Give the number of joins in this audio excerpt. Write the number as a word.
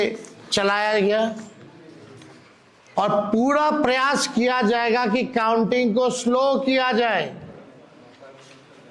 zero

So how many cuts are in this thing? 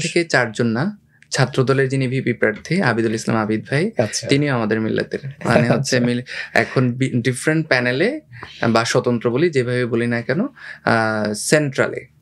zero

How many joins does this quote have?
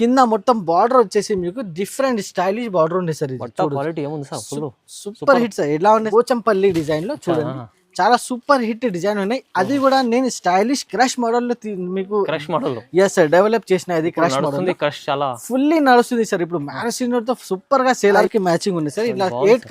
two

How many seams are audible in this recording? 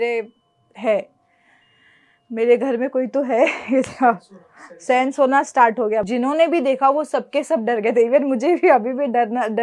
one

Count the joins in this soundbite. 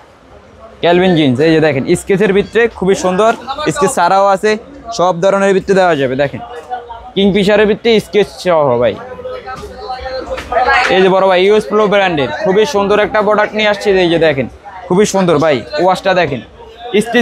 zero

